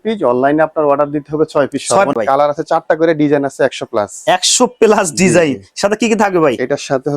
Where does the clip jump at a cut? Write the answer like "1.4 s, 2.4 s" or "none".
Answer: 2.1 s